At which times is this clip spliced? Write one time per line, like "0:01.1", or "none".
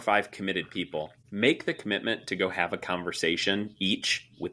0:01.2